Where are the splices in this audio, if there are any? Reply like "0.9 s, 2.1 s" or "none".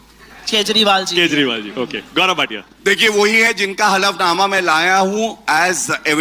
none